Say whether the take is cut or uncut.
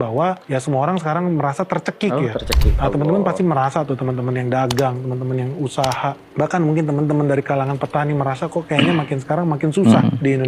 uncut